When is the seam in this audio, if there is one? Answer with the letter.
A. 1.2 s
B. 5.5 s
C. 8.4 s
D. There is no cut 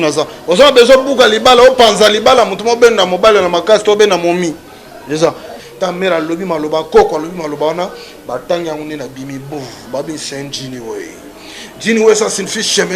B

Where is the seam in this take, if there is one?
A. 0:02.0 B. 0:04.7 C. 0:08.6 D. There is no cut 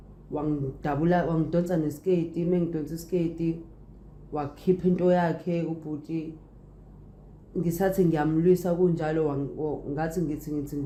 D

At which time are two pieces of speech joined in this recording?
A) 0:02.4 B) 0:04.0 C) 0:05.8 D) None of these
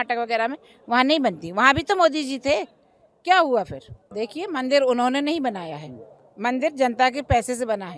B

